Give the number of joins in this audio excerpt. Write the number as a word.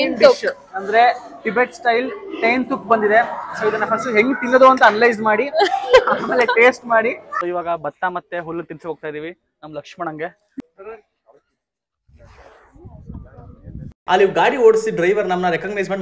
three